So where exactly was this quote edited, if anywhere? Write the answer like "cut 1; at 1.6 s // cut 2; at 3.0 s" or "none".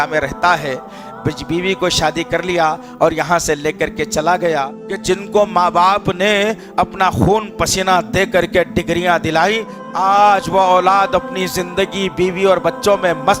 cut 1; at 4.8 s // cut 2; at 9.7 s